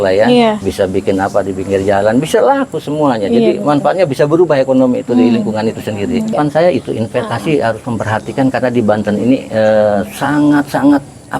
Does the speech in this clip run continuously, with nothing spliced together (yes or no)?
no